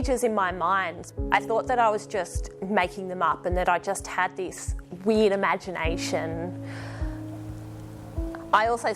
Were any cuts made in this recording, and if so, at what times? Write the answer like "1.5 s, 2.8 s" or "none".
1.0 s